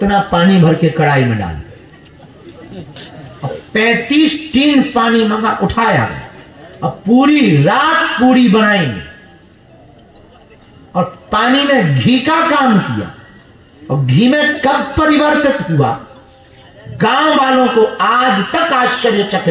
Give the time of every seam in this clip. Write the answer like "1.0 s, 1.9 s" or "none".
2.9 s